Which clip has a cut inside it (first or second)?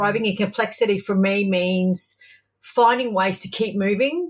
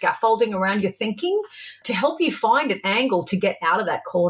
second